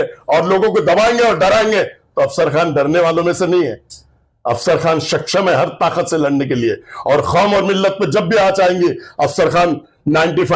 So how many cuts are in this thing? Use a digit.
0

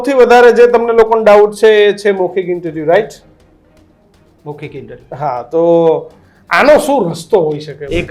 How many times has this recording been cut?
0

